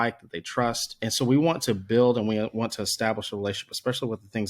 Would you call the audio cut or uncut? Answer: cut